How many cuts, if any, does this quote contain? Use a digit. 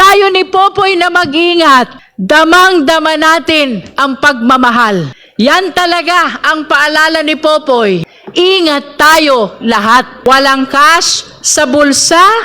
4